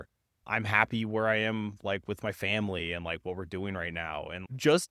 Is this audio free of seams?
yes; 0 cuts

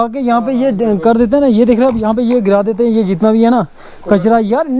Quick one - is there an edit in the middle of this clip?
no; 0 cuts

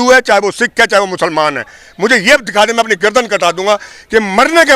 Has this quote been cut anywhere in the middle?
no; 0 cuts

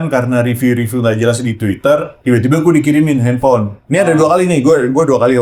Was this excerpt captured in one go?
yes; 0 cuts

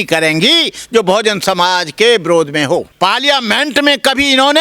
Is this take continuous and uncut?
no; 1 cut; at 2.9 s

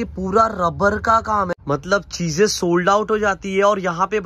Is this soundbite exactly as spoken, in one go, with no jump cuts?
no; 1 cut; at 1.5 s

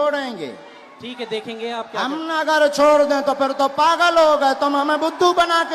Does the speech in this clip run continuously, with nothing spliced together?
yes; 0 cuts

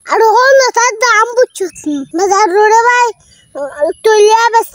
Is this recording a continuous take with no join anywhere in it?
yes; 0 cuts

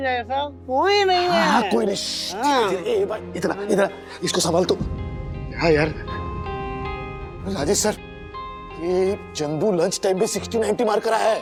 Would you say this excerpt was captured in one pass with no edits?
yes; 0 cuts

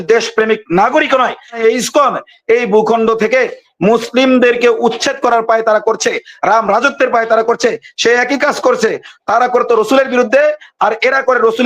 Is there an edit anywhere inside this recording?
yes; 1 cut; at 1.6 s

